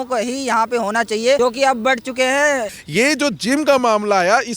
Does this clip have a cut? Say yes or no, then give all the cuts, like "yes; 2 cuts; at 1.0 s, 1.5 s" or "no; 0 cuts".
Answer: yes; 2 cuts; at 1.4 s, 2.8 s